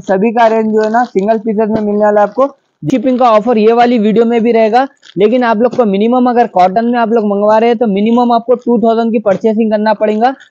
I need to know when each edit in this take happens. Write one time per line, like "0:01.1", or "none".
0:02.9